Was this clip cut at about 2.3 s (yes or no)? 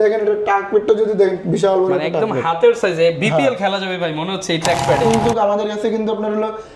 no